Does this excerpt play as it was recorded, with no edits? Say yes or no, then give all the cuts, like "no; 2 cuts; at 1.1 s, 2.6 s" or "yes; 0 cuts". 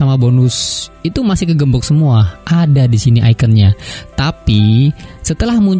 yes; 0 cuts